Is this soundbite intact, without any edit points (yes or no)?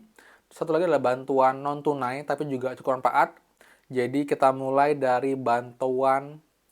yes